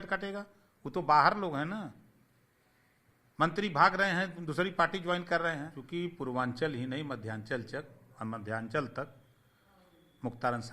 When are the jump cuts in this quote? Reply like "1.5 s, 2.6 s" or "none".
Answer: 5.7 s